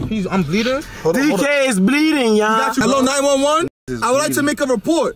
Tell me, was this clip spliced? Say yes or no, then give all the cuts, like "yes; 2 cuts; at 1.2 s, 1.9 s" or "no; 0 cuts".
yes; 1 cut; at 2.8 s